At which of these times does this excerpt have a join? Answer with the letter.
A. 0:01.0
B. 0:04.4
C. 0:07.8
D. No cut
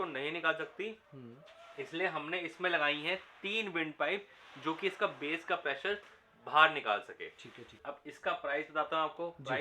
C